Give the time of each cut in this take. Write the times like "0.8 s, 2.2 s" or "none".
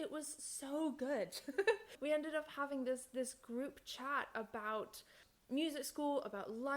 1.9 s, 5.2 s